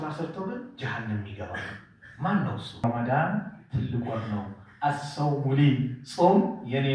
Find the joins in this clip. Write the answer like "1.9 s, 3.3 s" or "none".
2.8 s

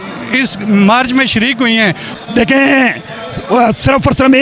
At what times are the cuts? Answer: 2.0 s

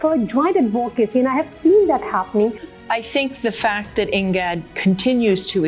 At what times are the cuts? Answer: 2.7 s

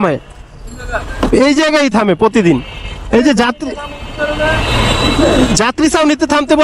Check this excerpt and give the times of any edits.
none

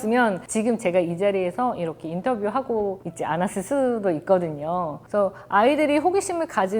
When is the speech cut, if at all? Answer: none

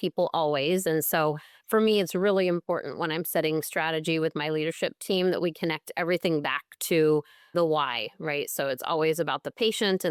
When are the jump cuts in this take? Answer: none

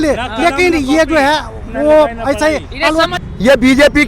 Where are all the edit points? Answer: 3.1 s

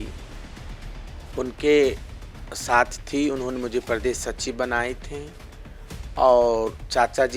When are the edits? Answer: none

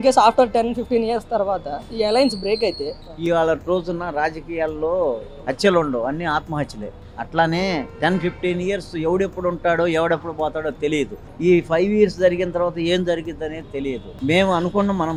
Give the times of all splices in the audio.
none

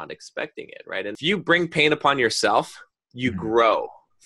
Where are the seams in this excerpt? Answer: 1.2 s

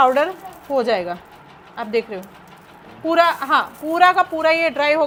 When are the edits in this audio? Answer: none

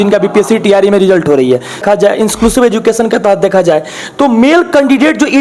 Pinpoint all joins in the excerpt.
1.8 s

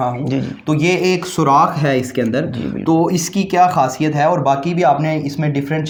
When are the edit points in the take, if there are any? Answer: none

